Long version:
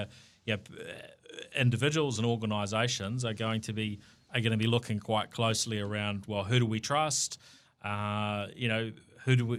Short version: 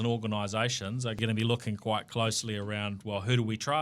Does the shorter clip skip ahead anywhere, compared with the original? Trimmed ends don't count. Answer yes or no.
yes